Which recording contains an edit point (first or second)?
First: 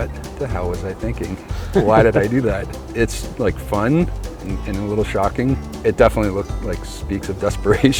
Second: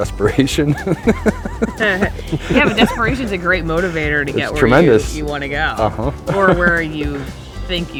first